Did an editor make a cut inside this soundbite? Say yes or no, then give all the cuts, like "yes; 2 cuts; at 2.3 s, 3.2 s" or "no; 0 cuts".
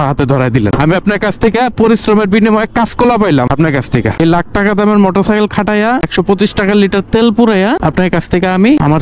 no; 0 cuts